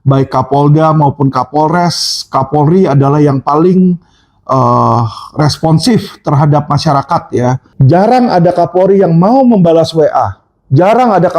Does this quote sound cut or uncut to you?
cut